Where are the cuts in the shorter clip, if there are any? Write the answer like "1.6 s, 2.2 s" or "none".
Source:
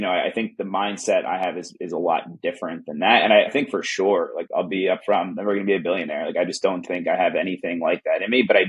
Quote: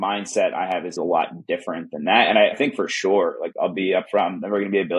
0.9 s